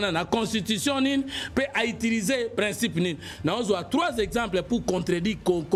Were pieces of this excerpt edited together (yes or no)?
no